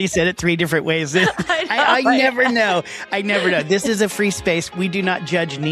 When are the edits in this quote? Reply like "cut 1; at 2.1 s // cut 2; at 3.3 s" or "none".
cut 1; at 4.7 s